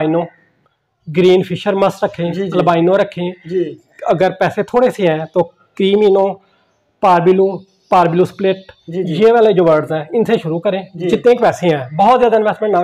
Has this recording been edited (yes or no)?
no